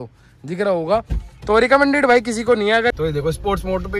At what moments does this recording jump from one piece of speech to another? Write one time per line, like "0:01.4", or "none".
0:03.0